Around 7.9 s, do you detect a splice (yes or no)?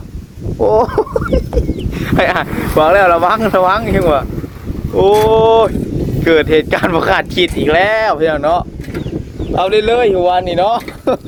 no